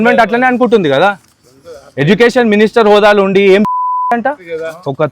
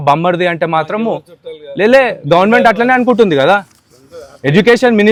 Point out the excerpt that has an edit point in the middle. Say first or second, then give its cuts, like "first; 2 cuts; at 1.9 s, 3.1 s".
first; 1 cut; at 4.1 s